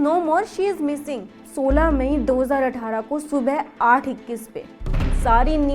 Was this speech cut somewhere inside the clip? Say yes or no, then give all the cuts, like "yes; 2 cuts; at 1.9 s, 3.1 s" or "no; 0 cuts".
yes; 1 cut; at 1.4 s